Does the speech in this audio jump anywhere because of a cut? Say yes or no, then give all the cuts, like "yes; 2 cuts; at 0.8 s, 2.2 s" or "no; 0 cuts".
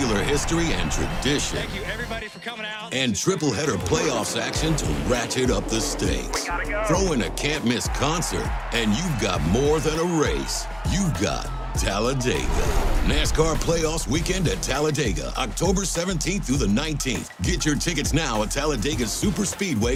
no; 0 cuts